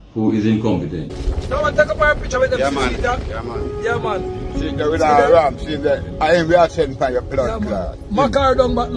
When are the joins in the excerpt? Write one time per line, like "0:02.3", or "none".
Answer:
0:01.2